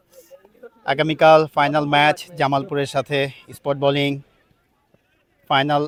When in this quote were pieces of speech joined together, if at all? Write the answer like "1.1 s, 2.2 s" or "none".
none